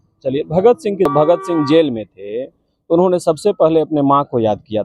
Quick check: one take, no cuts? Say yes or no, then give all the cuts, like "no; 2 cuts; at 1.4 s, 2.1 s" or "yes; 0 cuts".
no; 1 cut; at 1.1 s